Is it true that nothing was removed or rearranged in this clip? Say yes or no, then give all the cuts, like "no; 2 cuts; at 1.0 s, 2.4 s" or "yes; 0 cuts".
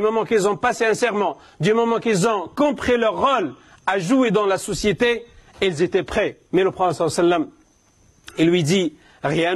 no; 1 cut; at 6.4 s